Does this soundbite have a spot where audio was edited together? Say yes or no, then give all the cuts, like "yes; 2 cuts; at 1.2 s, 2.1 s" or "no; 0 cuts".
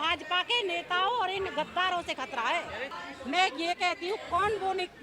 yes; 1 cut; at 2.9 s